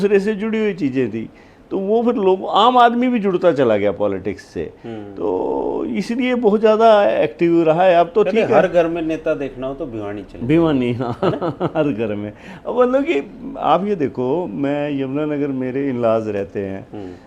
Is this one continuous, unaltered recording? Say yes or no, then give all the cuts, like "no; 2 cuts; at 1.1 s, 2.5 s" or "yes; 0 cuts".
yes; 0 cuts